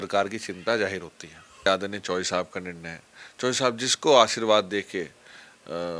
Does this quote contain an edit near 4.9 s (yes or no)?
no